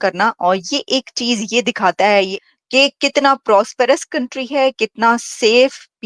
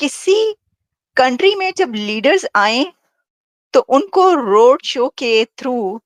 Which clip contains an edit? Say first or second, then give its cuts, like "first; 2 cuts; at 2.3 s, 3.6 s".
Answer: first; 1 cut; at 2.4 s